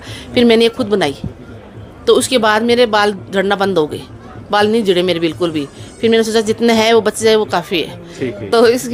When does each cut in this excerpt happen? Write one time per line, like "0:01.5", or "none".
none